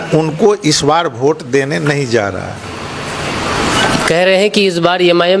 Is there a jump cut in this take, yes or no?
no